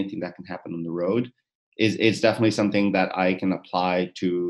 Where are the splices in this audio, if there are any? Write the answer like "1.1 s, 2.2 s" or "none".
none